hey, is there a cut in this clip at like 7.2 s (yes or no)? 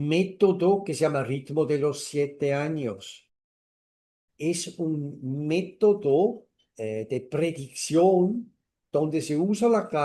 no